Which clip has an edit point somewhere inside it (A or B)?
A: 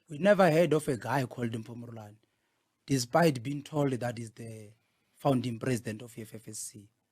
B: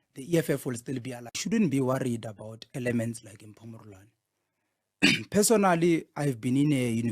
B